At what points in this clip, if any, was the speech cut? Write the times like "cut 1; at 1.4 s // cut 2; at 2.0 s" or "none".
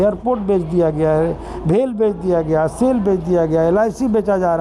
none